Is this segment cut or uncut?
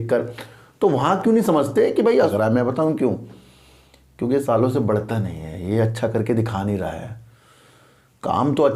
cut